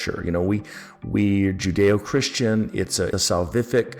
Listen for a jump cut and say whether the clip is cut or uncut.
cut